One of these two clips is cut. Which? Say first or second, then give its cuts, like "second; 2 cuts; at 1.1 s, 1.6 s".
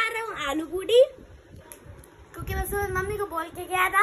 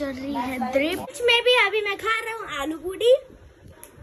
second; 1 cut; at 1.1 s